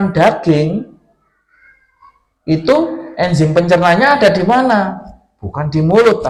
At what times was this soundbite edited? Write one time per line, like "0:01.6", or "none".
none

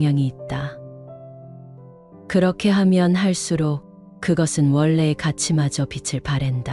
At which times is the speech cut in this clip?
0:00.9
0:02.3

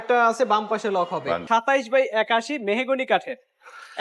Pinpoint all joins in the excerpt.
0:01.4

